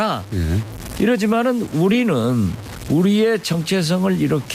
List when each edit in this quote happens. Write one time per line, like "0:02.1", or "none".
none